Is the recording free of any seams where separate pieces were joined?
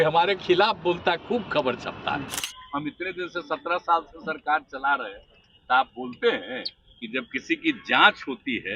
no; 1 cut; at 2.4 s

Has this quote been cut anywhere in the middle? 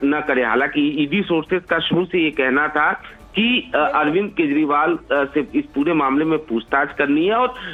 no; 0 cuts

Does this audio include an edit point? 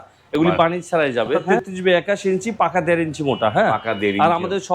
yes; 1 cut; at 1.5 s

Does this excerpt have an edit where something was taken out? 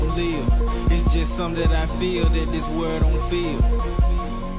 no; 0 cuts

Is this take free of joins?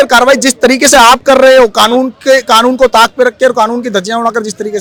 yes; 0 cuts

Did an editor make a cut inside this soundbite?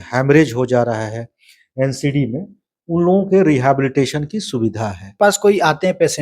yes; 1 cut; at 5.2 s

